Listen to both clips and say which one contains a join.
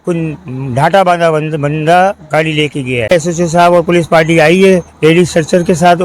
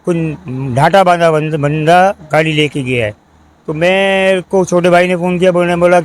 first; 1 cut; at 3.1 s

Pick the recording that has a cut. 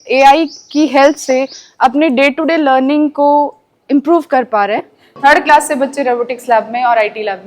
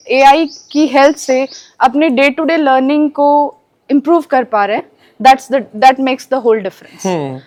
first; 1 cut; at 5.1 s

